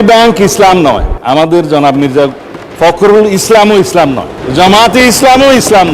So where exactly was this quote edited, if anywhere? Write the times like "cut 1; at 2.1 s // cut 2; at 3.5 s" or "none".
cut 1; at 1.1 s // cut 2; at 4.3 s